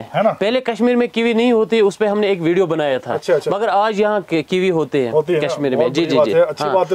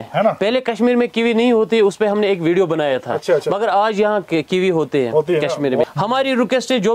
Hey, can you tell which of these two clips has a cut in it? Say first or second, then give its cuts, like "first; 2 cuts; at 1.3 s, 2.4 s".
second; 1 cut; at 5.8 s